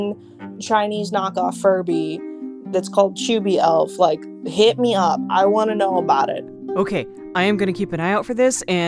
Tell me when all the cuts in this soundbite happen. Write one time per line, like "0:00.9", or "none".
none